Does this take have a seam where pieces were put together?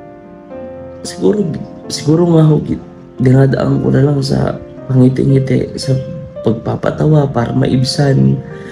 yes; 1 cut; at 1.0 s

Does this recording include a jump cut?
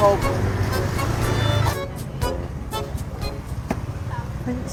no; 0 cuts

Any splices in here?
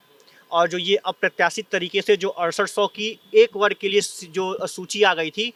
no; 0 cuts

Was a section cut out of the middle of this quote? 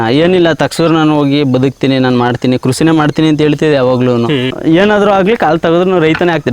yes; 1 cut; at 4.5 s

